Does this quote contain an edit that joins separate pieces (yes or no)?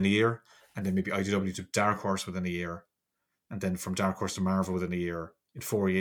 no